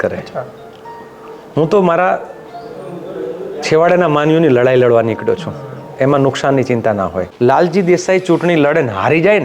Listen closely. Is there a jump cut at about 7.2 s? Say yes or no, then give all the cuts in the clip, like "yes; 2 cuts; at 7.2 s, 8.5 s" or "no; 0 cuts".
yes; 1 cut; at 7.2 s